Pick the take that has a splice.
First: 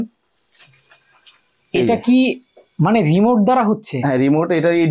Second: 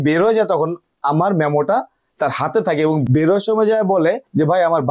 second; 1 cut; at 3.0 s

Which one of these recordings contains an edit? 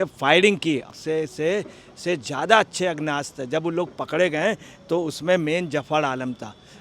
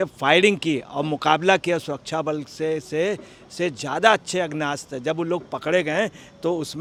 first; 1 cut; at 0.9 s

